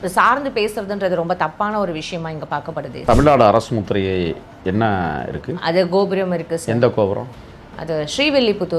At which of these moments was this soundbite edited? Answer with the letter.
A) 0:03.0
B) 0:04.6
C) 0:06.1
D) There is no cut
A